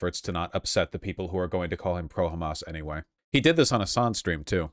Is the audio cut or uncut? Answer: cut